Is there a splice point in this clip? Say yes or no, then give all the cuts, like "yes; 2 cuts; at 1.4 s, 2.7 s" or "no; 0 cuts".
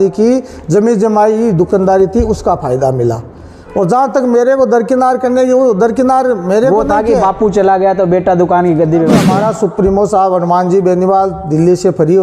yes; 1 cut; at 9.2 s